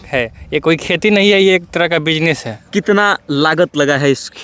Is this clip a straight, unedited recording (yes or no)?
no